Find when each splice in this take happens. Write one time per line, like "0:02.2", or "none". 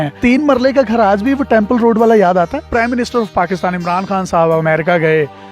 0:02.6